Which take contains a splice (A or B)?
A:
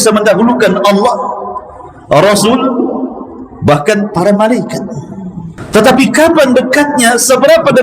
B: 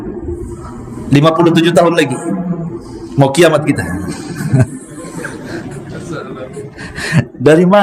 A